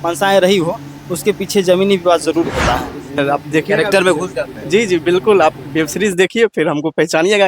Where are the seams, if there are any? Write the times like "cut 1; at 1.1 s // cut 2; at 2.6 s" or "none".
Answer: cut 1; at 3.1 s